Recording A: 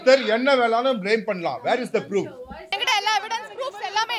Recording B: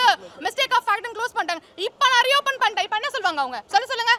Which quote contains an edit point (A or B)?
A